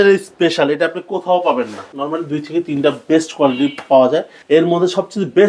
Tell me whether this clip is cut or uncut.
cut